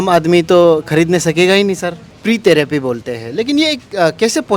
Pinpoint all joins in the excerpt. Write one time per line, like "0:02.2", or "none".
0:02.1